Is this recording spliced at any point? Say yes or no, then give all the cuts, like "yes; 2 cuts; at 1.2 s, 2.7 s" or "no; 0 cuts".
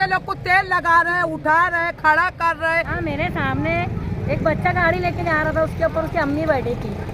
yes; 1 cut; at 2.9 s